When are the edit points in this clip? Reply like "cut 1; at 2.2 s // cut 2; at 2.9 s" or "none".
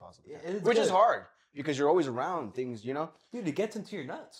none